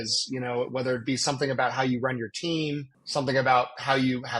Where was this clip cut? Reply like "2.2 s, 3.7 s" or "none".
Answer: 2.9 s